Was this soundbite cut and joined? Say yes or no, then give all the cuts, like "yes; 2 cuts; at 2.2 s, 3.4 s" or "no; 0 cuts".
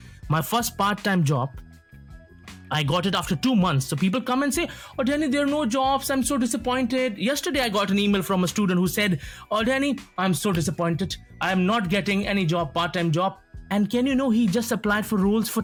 no; 0 cuts